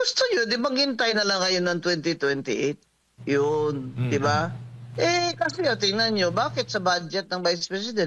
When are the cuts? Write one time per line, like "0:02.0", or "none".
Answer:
none